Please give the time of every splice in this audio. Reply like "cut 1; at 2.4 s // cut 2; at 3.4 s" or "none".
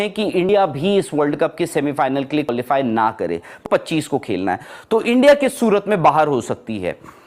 cut 1; at 3.6 s